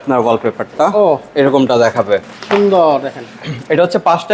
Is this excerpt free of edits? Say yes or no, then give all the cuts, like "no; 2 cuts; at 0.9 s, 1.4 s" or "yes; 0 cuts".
yes; 0 cuts